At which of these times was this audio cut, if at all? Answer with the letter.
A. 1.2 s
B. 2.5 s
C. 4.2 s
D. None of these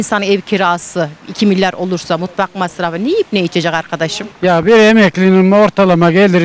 C